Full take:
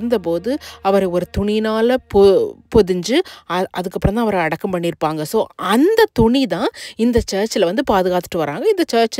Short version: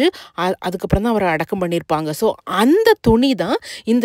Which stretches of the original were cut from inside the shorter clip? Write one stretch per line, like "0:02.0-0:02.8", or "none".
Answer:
none